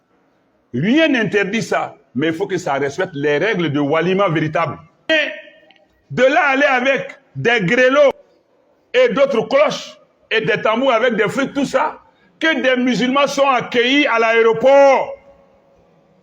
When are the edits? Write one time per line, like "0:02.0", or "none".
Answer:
0:05.1
0:08.3